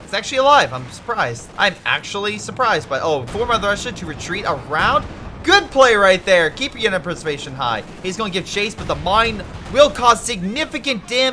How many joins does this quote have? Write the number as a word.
one